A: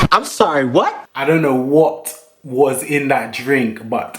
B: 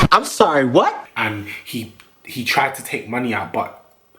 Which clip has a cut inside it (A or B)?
A